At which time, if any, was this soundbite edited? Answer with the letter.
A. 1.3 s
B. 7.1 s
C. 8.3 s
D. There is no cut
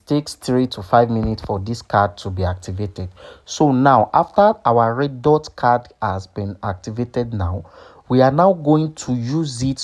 D